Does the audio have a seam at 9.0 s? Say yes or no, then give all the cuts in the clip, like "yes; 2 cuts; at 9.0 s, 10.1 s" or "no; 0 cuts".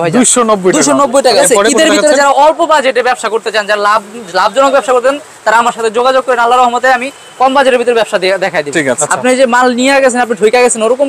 yes; 2 cuts; at 1.4 s, 9.0 s